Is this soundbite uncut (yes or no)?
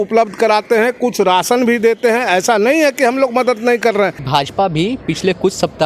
no